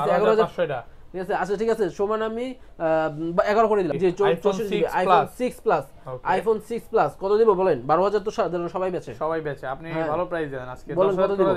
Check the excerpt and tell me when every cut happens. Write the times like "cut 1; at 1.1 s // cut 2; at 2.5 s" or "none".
cut 1; at 3.9 s